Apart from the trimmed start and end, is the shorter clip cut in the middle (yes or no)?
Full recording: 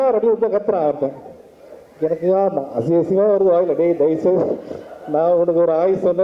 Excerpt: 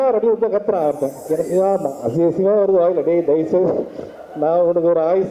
yes